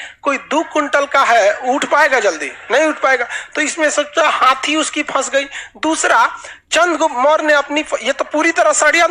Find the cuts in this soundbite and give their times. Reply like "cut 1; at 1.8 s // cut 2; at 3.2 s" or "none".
none